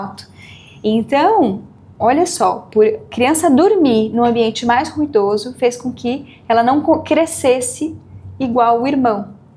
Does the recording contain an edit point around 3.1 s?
yes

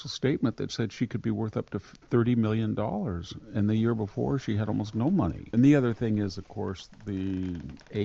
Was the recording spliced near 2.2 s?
no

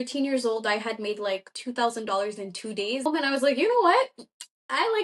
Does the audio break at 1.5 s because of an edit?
no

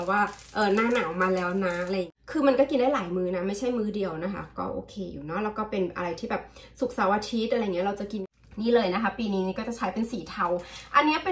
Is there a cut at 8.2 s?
yes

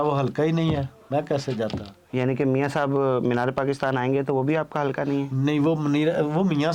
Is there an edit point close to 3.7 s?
no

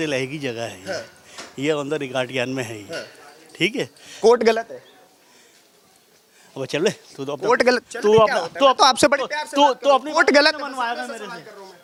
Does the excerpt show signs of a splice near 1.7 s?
no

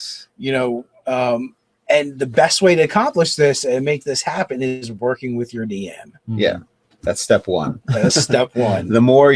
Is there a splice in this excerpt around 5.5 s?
yes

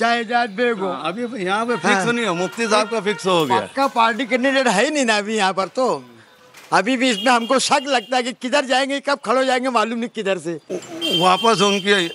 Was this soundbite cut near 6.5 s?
no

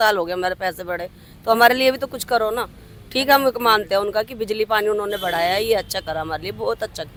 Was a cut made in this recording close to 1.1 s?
no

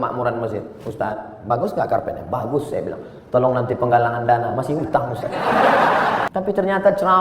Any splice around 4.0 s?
no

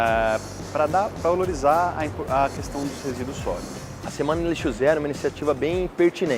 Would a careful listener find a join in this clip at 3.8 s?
yes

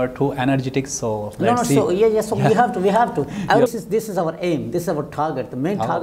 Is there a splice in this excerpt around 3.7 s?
yes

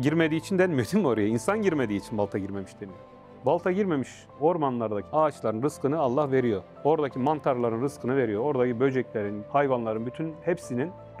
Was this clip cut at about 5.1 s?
yes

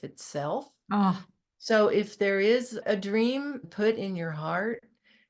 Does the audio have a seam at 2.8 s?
yes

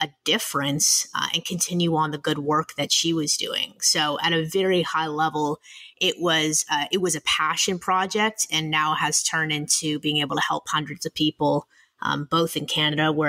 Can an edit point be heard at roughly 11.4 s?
no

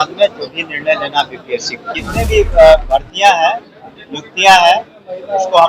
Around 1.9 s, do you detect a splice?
yes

